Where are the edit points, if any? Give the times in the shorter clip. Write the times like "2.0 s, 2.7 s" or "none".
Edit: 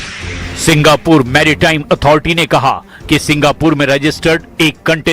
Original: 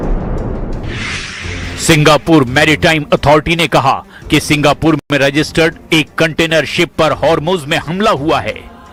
3.8 s